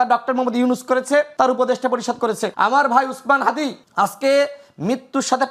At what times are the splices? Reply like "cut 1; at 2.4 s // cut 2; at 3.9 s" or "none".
cut 1; at 1.3 s // cut 2; at 2.5 s // cut 3; at 3.8 s